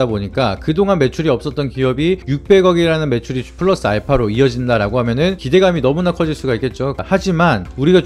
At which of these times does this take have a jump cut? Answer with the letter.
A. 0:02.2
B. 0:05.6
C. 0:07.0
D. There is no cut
C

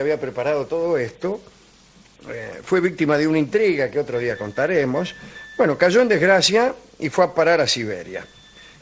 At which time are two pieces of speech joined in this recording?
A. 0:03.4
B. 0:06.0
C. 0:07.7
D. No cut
A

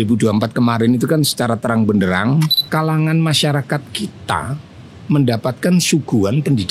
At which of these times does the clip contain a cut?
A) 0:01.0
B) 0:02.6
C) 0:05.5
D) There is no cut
B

